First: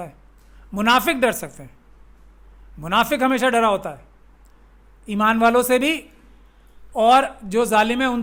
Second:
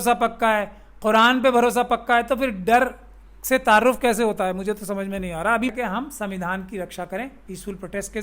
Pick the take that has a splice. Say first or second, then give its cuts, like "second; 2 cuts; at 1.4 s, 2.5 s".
second; 1 cut; at 5.7 s